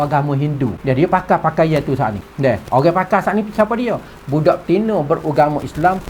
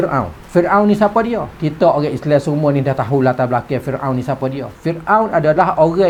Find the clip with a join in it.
first; 2 cuts; at 0.8 s, 2.2 s

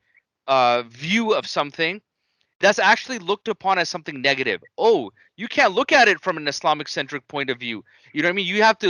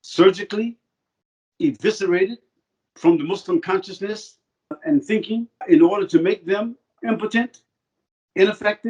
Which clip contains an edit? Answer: second; 3 cuts; at 4.8 s, 5.6 s, 7.0 s

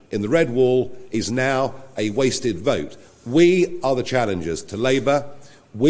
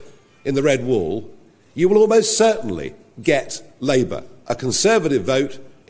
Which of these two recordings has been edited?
second; 1 cut; at 4.3 s

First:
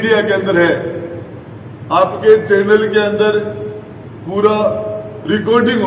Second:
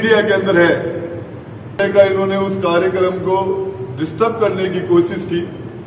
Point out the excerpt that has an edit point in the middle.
second; 1 cut; at 1.8 s

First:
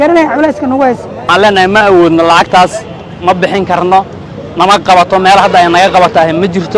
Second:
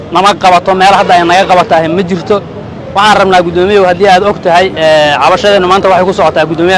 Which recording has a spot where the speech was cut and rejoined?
first; 1 cut; at 1.2 s

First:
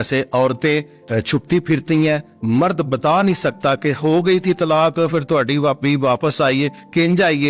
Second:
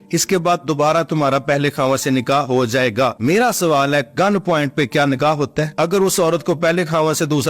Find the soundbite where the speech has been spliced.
second; 2 cuts; at 3.1 s, 5.7 s

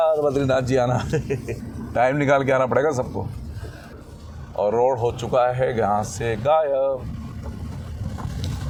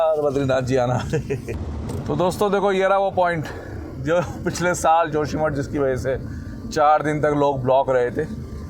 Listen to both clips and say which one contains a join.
second; 1 cut; at 1.6 s

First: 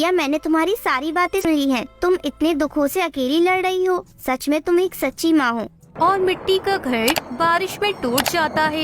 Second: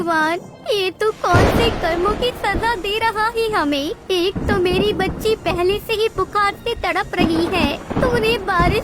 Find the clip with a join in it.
first; 2 cuts; at 1.4 s, 5.9 s

